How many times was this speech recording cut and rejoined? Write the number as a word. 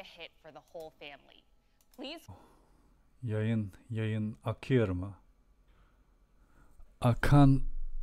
one